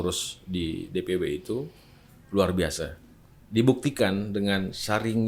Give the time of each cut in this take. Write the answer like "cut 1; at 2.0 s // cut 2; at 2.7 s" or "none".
none